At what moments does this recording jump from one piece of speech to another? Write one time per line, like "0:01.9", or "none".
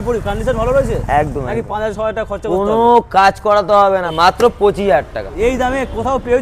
0:01.7
0:04.1
0:05.3